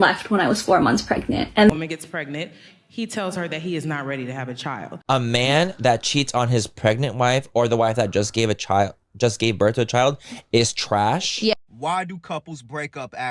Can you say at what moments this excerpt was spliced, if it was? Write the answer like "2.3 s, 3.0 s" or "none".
1.7 s, 5.0 s, 11.3 s